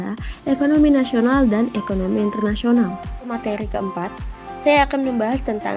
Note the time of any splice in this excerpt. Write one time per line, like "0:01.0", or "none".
0:03.3